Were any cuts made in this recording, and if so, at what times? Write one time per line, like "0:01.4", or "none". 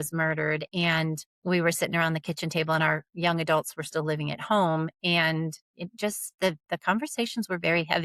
none

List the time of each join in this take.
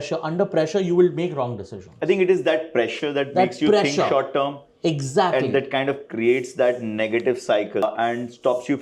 0:07.8

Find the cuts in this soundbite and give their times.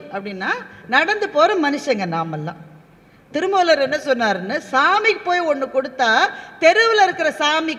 none

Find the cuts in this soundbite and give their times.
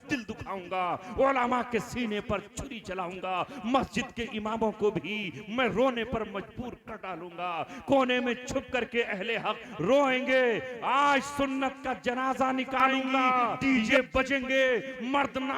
0:13.6

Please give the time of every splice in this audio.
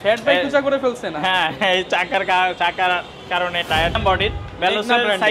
0:04.0

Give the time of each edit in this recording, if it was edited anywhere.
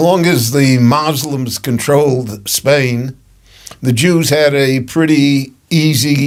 none

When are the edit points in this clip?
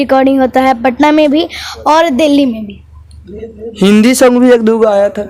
none

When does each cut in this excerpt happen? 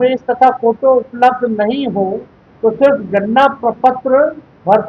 none

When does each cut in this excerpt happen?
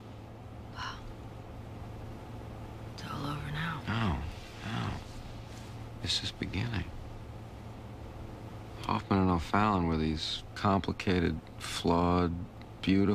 0:08.2

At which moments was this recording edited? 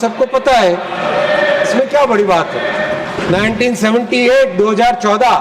0:03.2

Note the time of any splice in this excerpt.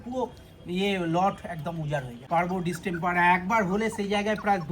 0:02.1

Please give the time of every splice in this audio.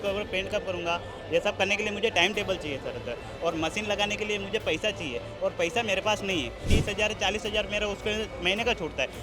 0:06.7

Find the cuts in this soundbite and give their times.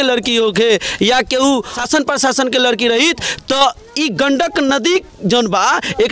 0:01.8

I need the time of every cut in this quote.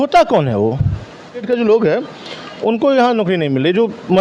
0:01.4

